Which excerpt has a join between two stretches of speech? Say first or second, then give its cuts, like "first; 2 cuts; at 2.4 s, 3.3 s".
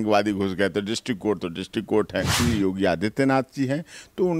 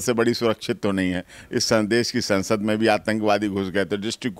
first; 1 cut; at 2.4 s